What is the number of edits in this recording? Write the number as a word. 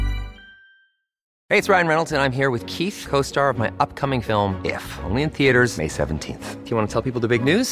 one